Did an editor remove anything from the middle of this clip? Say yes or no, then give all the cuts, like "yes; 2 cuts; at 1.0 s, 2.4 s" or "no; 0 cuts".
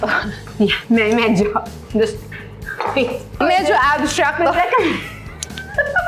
no; 0 cuts